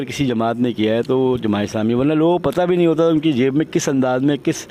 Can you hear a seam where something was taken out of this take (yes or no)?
no